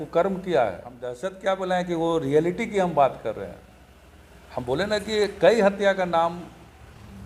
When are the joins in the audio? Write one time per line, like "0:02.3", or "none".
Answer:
0:01.3

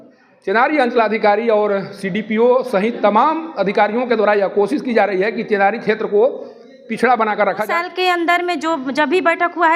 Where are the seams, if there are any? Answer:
0:07.7

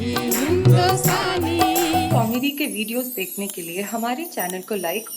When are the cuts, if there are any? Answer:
0:02.1

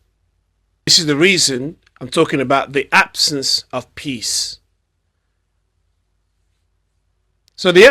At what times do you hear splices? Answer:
0:00.9

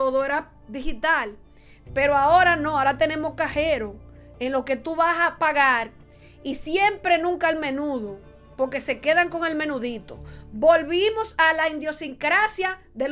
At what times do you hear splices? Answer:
none

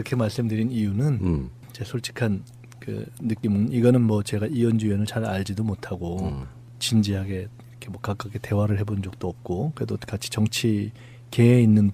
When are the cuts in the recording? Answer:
0:03.9

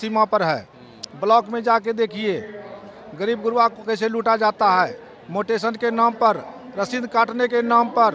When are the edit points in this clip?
none

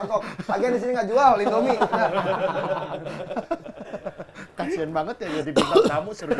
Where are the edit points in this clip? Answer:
none

